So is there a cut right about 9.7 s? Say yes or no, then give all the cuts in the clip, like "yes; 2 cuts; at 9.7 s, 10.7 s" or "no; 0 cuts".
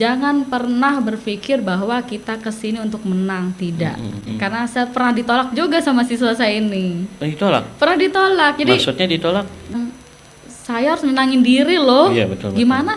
yes; 2 cuts; at 4.3 s, 9.7 s